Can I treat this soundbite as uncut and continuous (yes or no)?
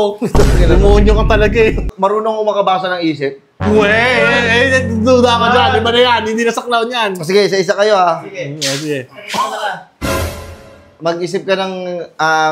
no